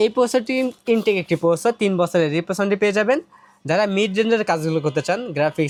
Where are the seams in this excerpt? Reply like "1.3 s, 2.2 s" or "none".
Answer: none